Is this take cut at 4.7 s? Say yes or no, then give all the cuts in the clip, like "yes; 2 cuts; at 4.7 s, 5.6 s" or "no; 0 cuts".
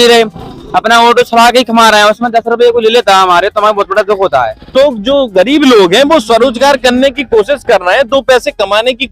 yes; 1 cut; at 4.7 s